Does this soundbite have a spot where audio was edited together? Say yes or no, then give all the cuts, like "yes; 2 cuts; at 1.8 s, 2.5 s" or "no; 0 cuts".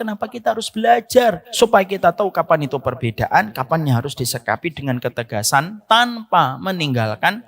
yes; 1 cut; at 1.4 s